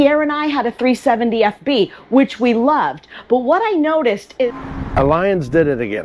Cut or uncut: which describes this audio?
cut